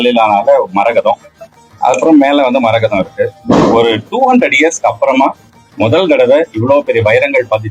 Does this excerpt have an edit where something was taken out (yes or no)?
no